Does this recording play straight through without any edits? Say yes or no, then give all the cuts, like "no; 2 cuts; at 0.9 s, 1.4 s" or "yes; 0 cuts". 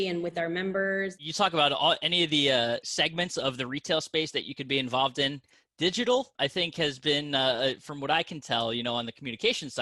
no; 3 cuts; at 1.2 s, 2.9 s, 6.3 s